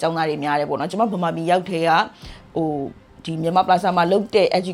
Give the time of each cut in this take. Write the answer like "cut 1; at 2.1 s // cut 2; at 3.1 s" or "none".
none